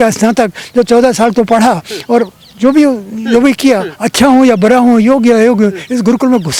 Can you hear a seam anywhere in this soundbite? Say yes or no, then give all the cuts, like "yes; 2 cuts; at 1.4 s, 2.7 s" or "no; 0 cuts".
no; 0 cuts